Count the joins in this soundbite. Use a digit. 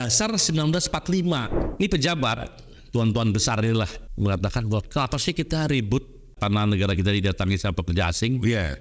3